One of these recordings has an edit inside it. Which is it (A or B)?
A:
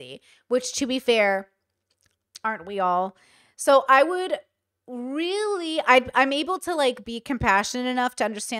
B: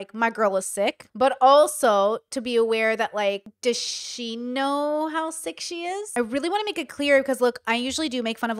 B